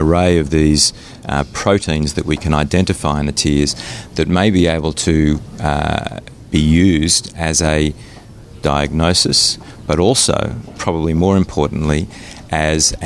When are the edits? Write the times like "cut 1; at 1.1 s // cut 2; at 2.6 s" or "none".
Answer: none